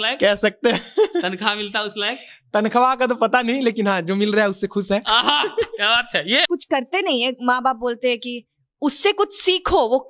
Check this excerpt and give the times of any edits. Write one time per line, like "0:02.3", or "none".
0:06.5